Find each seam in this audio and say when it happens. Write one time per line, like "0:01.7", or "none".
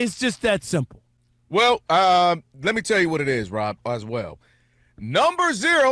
none